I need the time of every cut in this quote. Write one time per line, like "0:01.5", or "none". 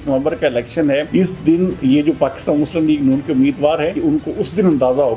0:01.1
0:03.9